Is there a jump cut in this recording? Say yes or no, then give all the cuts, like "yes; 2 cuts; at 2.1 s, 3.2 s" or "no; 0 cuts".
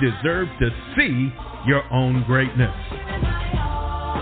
yes; 1 cut; at 2.9 s